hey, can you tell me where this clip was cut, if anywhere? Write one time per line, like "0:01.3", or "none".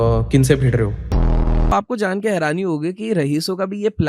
0:01.3